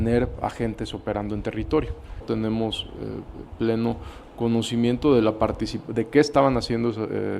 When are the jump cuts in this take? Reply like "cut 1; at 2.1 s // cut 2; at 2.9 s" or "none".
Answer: cut 1; at 2.2 s